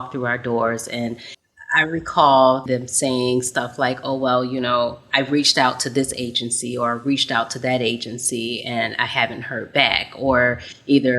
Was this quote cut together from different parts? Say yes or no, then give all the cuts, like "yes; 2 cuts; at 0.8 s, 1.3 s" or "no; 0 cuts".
yes; 2 cuts; at 1.3 s, 2.7 s